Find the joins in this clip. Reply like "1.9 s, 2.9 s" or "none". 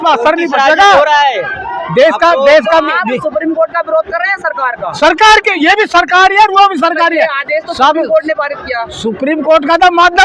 none